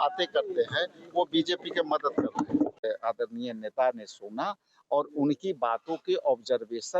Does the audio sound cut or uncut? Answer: uncut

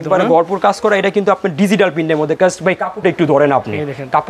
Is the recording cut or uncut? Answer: uncut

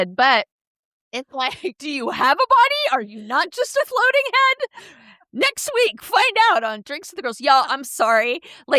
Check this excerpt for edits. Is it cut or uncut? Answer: uncut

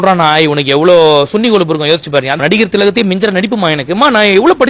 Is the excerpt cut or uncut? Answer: cut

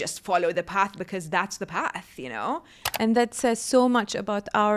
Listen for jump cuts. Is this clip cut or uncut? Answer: cut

